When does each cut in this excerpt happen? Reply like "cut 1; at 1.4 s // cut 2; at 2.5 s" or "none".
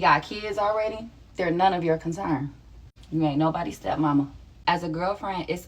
cut 1; at 3.8 s // cut 2; at 4.8 s